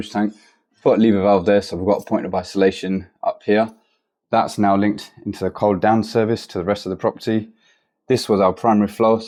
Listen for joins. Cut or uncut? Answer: uncut